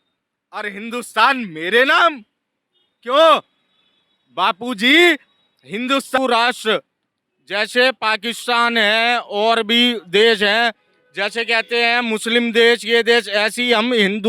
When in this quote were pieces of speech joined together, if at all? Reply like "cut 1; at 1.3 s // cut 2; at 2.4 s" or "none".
cut 1; at 6.2 s